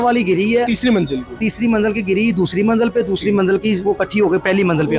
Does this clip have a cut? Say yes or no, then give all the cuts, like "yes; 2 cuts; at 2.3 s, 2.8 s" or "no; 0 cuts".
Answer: no; 0 cuts